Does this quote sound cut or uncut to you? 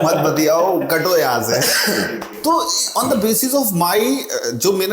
uncut